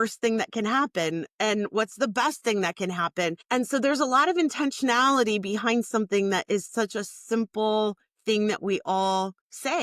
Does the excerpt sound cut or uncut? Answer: cut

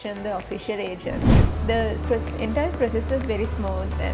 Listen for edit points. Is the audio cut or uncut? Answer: cut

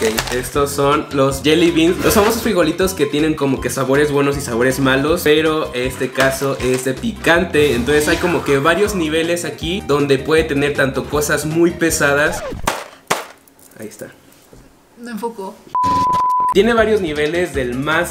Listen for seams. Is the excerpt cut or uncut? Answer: uncut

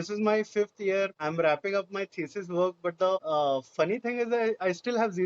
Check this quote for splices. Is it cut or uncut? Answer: cut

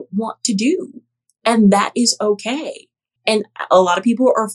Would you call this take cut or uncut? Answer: uncut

